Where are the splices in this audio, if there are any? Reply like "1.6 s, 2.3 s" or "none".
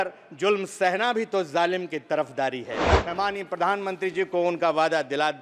2.9 s